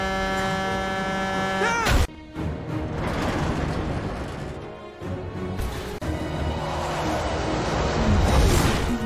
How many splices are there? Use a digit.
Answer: 1